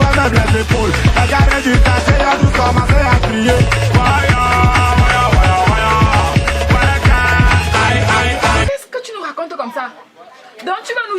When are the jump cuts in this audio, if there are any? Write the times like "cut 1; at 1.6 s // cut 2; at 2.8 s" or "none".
cut 1; at 8.7 s